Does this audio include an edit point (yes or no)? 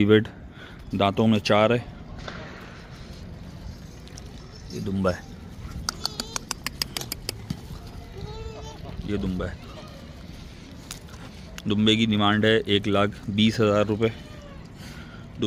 no